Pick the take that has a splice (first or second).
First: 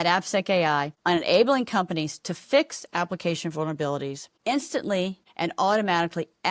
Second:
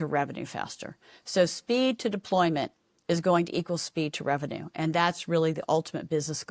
first